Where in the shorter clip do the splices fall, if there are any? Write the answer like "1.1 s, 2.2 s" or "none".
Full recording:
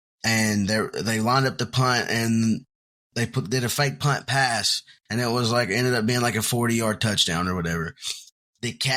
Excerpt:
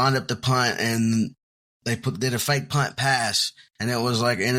none